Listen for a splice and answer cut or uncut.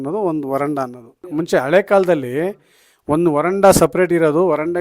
cut